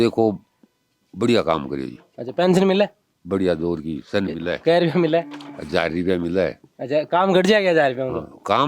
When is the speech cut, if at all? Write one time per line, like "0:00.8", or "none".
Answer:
none